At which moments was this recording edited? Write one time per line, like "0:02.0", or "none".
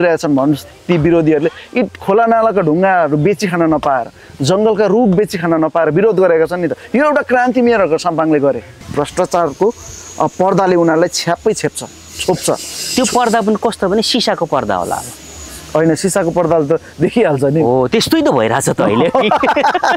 0:08.7